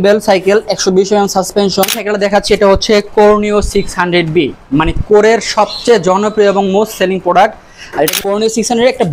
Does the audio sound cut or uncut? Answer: cut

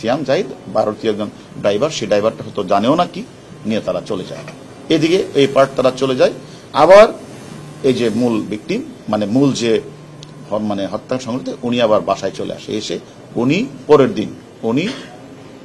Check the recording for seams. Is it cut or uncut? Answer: cut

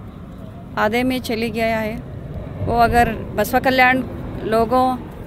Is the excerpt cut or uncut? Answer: uncut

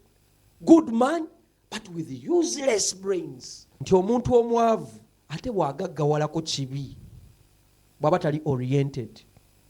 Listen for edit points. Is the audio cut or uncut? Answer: cut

